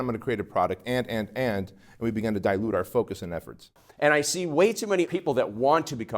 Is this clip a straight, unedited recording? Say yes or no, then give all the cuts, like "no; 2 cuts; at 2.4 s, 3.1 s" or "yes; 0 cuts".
no; 2 cuts; at 3.7 s, 5.1 s